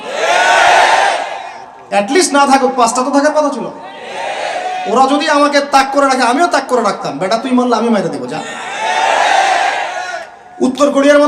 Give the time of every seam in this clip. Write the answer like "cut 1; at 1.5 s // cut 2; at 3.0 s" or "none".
none